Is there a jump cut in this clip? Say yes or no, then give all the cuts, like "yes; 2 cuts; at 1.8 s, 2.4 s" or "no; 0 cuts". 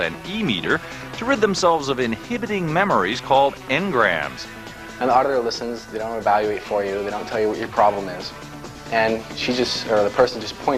no; 0 cuts